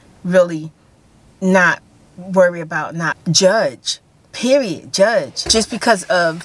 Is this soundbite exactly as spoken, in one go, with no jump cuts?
no; 2 cuts; at 3.1 s, 5.4 s

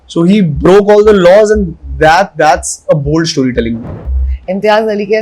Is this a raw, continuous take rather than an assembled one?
no; 1 cut; at 3.9 s

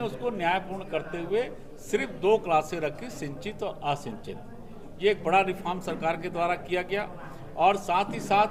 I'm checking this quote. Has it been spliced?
no; 0 cuts

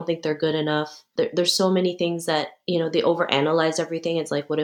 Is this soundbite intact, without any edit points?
no; 2 cuts; at 1.0 s, 2.6 s

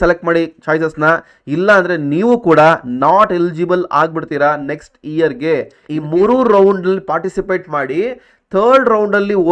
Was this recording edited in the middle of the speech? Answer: yes; 1 cut; at 5.9 s

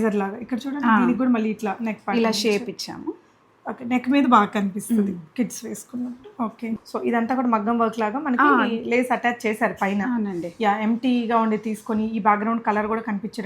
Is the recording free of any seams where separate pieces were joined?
no; 1 cut; at 6.9 s

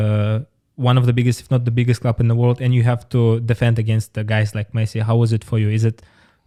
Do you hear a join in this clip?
no; 0 cuts

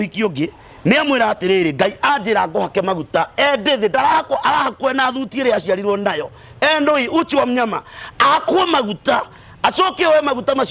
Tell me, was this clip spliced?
no; 0 cuts

